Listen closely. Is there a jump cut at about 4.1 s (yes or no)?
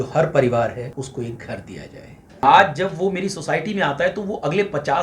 no